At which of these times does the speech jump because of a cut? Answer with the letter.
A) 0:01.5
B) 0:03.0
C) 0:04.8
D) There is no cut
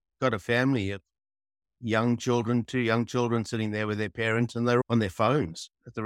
C